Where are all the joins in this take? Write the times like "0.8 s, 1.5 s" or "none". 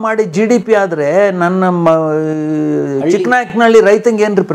none